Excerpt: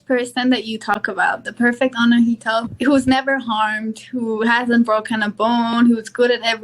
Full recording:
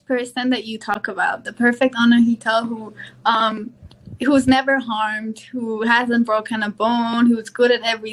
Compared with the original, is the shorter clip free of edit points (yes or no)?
no